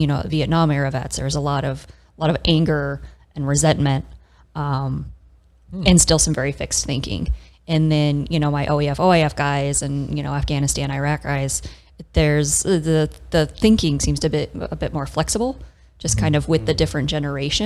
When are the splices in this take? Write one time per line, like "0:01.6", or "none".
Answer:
none